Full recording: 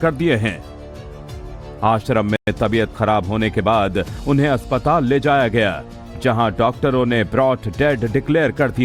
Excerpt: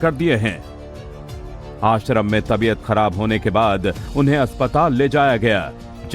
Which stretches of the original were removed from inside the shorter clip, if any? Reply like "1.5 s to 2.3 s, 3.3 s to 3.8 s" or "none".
2.4 s to 2.5 s